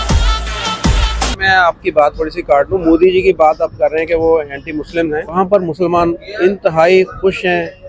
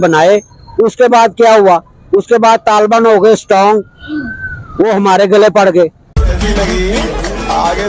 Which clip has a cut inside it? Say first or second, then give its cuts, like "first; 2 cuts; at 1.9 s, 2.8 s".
first; 1 cut; at 5.3 s